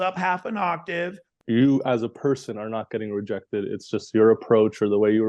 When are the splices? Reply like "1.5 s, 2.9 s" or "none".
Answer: 1.3 s